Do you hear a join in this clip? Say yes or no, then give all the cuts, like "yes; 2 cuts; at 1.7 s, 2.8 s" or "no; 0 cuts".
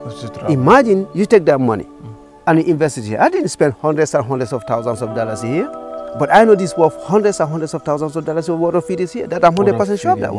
no; 0 cuts